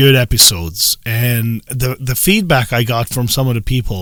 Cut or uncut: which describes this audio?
uncut